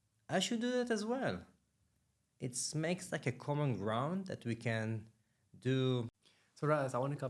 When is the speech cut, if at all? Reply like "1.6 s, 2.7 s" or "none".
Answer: 6.1 s